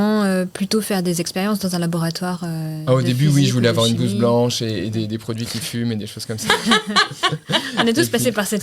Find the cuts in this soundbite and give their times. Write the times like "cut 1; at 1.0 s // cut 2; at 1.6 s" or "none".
none